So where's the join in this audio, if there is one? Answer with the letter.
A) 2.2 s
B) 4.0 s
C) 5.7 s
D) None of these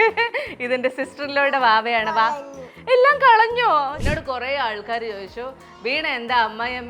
B